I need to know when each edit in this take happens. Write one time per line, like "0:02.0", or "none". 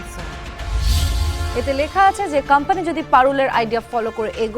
0:01.2